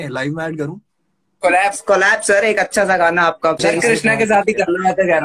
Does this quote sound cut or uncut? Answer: cut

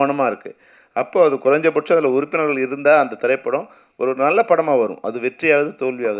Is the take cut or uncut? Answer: uncut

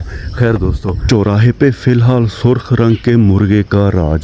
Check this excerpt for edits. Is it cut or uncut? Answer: cut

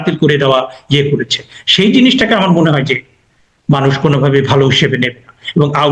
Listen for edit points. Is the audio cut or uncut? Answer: uncut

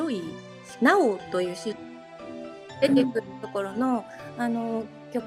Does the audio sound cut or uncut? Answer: uncut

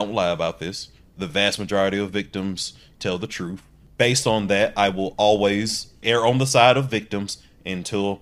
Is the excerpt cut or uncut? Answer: cut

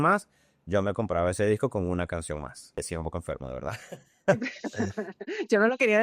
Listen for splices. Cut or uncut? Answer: cut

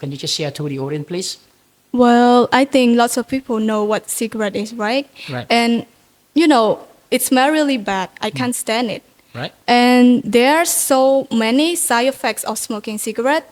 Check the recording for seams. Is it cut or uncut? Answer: uncut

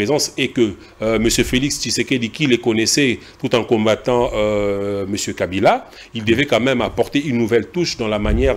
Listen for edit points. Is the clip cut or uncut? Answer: uncut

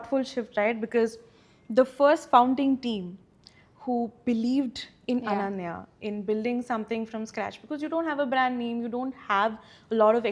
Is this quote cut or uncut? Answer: uncut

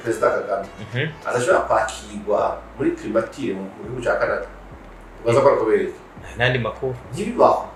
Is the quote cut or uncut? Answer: uncut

